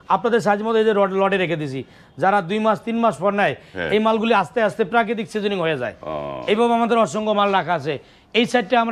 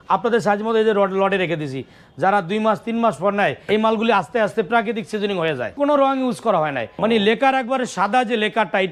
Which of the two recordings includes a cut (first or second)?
second